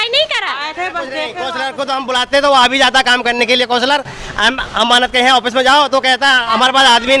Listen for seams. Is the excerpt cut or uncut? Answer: cut